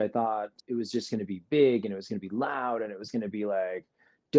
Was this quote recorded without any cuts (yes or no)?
yes